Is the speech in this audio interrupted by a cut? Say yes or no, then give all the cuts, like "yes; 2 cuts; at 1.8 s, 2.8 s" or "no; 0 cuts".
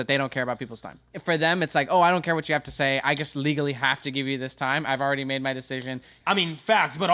yes; 2 cuts; at 1.1 s, 6.1 s